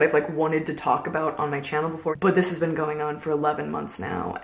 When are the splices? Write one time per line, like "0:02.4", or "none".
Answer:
0:02.1